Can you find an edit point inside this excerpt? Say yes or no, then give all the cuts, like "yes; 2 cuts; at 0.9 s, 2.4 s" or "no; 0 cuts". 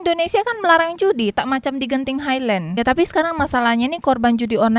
yes; 1 cut; at 2.7 s